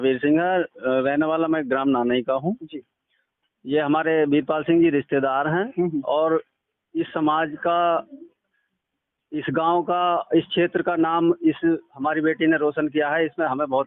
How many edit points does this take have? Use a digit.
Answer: 0